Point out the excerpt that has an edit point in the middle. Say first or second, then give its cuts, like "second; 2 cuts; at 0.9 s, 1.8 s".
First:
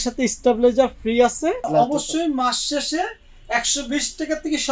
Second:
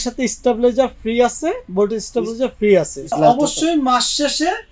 first; 1 cut; at 1.6 s